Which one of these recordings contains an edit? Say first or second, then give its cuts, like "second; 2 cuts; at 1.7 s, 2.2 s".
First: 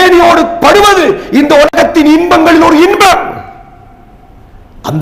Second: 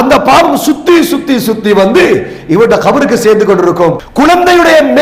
second; 1 cut; at 4.0 s